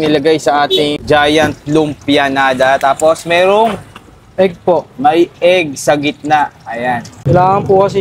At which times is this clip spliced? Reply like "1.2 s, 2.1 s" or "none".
1.0 s, 7.1 s

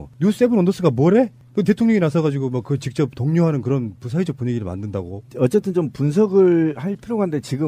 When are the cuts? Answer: 4.1 s

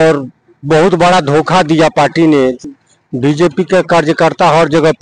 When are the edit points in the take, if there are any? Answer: 2.6 s

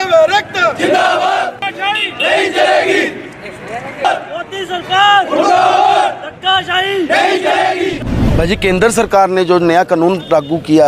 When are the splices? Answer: 1.6 s, 8.1 s

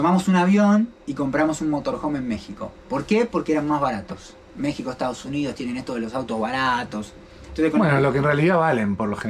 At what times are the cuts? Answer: none

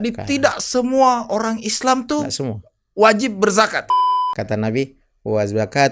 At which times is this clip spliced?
3.9 s

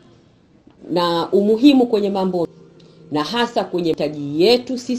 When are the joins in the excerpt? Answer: 2.5 s, 4.0 s

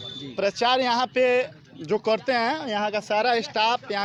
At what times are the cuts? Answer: none

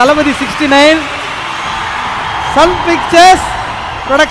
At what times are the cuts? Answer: 1.1 s

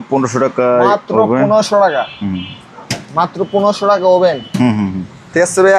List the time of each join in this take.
none

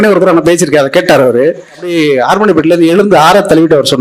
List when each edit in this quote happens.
1.9 s

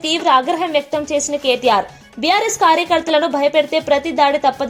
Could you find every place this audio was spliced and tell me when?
none

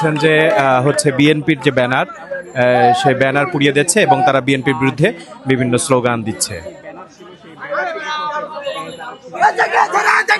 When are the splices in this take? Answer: none

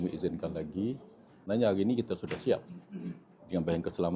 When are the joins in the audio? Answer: 1.3 s

